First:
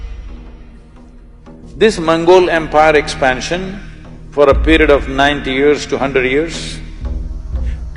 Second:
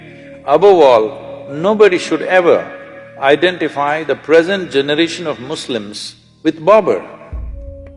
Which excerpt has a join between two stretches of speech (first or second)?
first